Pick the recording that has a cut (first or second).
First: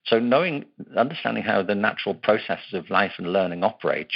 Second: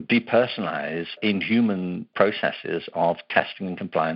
second